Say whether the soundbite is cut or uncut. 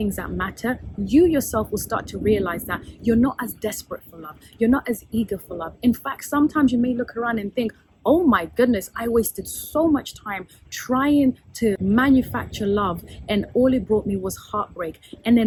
uncut